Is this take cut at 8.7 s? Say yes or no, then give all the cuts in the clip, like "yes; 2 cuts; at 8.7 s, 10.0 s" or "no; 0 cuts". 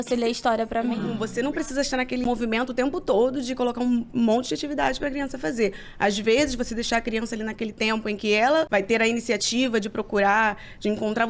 yes; 3 cuts; at 1.2 s, 2.3 s, 8.7 s